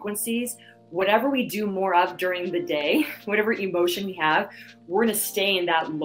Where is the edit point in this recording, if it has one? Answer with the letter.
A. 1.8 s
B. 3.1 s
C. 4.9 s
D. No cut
D